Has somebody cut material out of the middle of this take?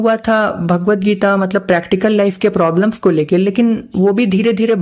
no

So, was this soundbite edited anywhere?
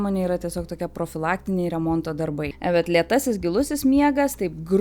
yes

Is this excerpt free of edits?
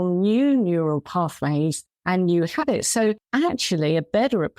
no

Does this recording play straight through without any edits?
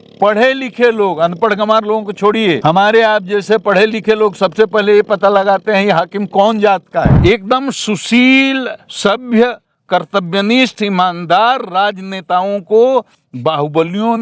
no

